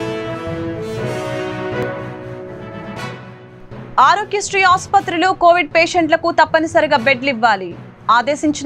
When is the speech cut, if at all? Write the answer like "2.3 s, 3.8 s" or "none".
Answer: 2.6 s

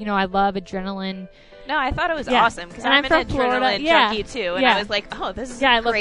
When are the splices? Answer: 1.5 s

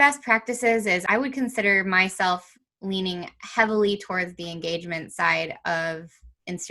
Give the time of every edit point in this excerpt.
1.0 s

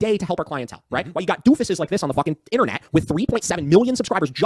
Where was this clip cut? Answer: none

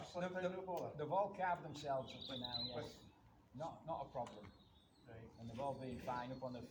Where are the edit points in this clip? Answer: none

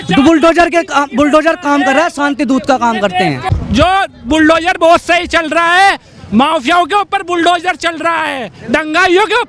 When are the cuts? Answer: 3.4 s

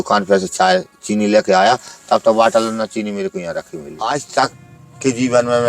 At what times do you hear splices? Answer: 3.9 s

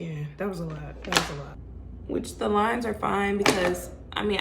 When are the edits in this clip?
1.4 s

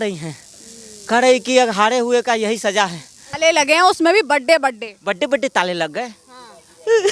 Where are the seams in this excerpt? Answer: 3.3 s

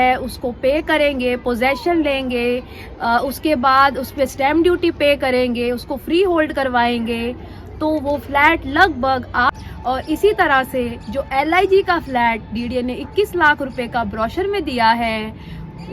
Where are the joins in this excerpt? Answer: 9.5 s

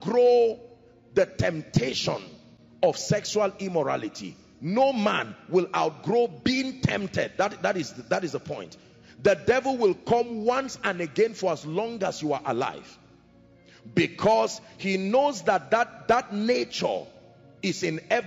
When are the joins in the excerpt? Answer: none

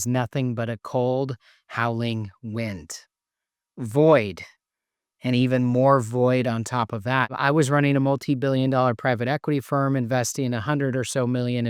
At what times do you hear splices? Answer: 7.3 s

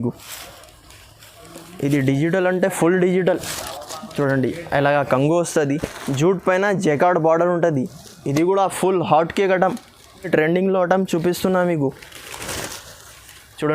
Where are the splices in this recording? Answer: 5.9 s, 10.3 s

